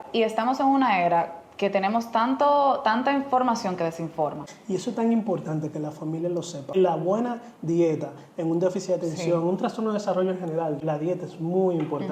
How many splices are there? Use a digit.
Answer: 3